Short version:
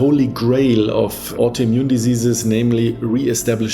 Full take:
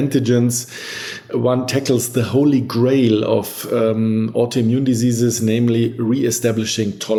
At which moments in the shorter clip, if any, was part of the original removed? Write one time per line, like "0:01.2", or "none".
0:01.3